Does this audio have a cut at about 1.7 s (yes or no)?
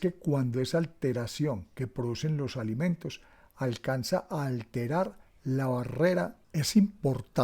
no